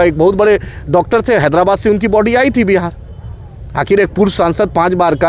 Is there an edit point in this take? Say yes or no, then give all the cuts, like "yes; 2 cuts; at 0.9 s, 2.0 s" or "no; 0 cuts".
no; 0 cuts